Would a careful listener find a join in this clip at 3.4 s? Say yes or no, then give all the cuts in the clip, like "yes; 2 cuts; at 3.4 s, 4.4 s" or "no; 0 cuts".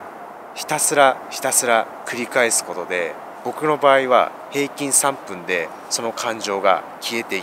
no; 0 cuts